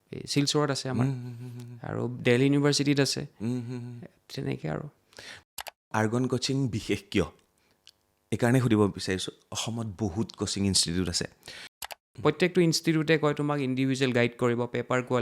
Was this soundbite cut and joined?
yes; 2 cuts; at 5.6 s, 11.9 s

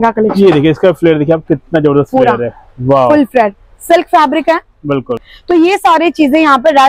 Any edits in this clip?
yes; 1 cut; at 5.3 s

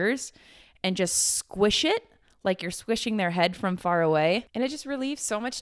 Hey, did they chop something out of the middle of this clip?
yes; 1 cut; at 4.5 s

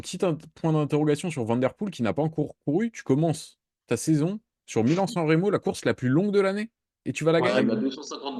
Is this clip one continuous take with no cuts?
yes; 0 cuts

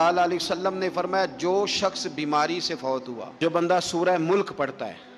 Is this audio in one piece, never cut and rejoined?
no; 1 cut; at 3.3 s

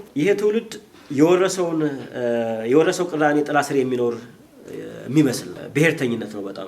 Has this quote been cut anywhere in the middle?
no; 0 cuts

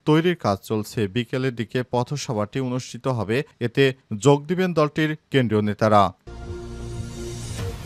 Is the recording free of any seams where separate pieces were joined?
no; 1 cut; at 6.2 s

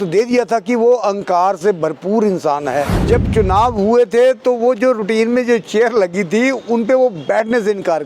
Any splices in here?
yes; 1 cut; at 3.0 s

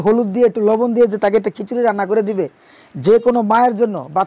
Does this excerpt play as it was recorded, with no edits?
yes; 0 cuts

